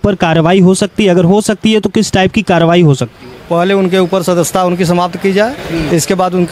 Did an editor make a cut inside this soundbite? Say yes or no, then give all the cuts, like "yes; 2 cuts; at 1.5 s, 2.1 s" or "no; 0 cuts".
no; 0 cuts